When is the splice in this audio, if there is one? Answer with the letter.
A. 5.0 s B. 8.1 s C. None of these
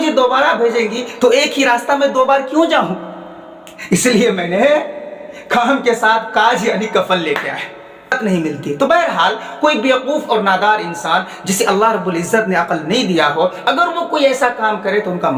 B